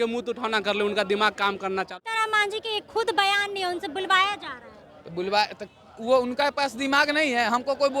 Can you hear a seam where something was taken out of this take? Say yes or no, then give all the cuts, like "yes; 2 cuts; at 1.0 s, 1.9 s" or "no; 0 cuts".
yes; 1 cut; at 1.9 s